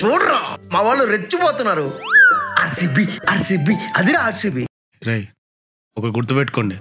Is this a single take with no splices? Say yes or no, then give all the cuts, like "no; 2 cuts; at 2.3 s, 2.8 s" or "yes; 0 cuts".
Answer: no; 1 cut; at 4.8 s